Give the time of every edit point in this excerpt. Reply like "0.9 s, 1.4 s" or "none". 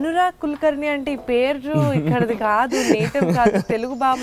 none